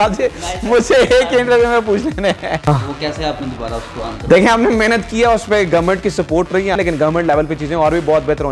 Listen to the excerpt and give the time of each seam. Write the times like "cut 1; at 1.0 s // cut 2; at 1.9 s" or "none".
cut 1; at 2.6 s // cut 2; at 6.8 s